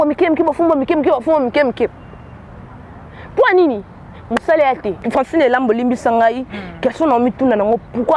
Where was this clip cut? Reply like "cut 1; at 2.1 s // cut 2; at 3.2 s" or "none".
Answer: cut 1; at 5.0 s